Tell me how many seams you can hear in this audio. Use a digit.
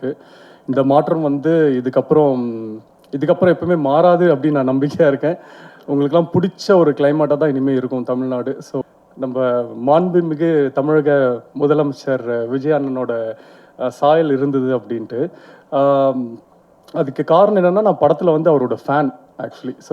1